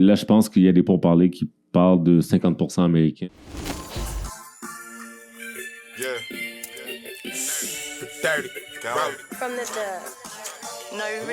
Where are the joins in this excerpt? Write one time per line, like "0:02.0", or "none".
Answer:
0:03.2

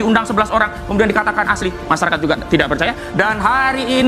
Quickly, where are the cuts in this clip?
none

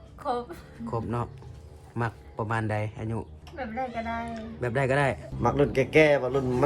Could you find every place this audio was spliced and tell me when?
0:03.4
0:05.3

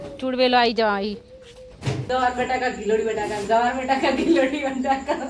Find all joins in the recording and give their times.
0:02.0

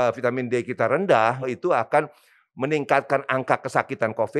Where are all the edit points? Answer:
0:01.5

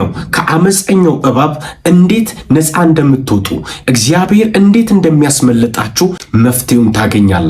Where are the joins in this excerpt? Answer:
none

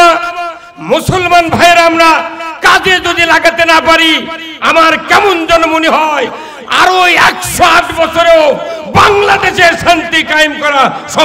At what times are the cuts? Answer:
none

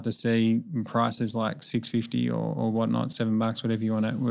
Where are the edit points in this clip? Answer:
none

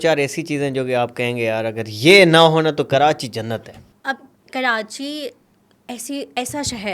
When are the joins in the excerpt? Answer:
none

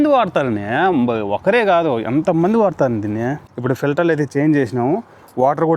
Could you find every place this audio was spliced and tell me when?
0:03.4

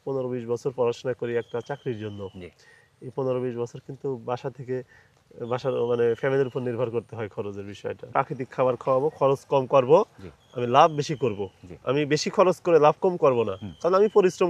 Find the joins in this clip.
0:08.1

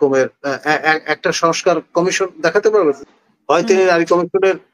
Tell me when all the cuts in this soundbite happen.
0:03.0

